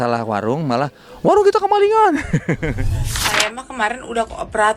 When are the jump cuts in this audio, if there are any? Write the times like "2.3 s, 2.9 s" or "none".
3.2 s